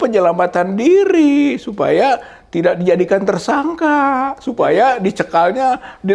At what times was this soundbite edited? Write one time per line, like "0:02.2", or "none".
none